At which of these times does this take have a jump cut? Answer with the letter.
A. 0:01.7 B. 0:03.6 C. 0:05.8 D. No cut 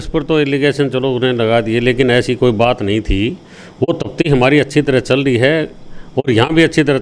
D